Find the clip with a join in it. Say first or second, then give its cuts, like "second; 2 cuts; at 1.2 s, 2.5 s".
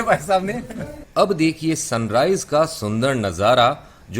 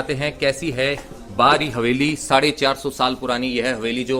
first; 1 cut; at 1.0 s